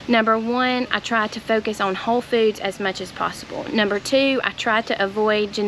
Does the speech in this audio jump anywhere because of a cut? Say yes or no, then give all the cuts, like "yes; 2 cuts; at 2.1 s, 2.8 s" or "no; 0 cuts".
no; 0 cuts